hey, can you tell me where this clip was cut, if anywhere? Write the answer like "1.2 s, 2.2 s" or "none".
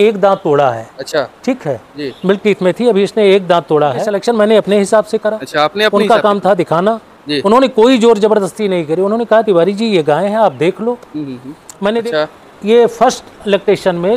4.1 s, 12.0 s